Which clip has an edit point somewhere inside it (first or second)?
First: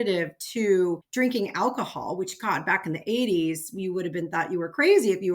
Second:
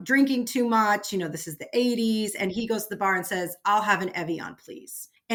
first